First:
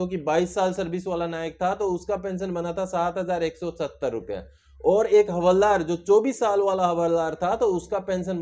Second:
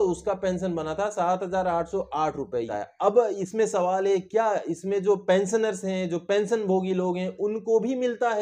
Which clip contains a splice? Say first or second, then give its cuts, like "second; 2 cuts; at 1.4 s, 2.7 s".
second; 1 cut; at 2.7 s